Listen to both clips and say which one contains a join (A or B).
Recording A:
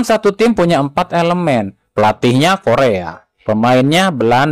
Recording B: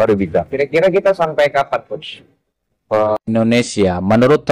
B